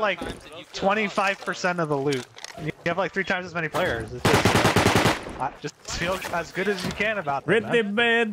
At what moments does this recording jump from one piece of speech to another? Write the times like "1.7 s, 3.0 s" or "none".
none